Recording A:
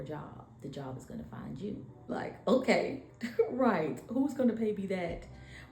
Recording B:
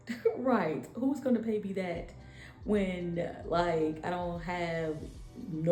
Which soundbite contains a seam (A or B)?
A